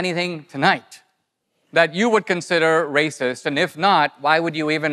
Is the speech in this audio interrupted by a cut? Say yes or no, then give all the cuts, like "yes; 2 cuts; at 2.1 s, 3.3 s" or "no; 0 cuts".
no; 0 cuts